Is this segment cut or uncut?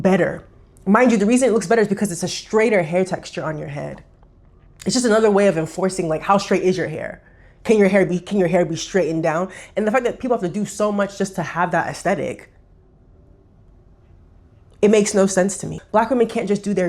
cut